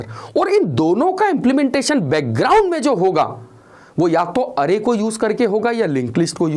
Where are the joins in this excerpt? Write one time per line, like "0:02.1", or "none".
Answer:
none